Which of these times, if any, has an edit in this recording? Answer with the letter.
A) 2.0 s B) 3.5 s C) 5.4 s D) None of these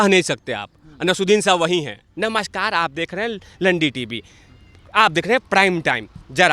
A